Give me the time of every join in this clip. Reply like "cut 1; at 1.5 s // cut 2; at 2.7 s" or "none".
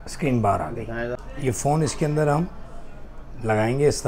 cut 1; at 1.2 s